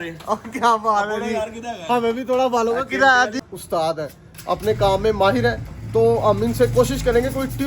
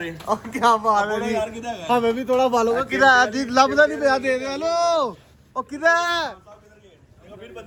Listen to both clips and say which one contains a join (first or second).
first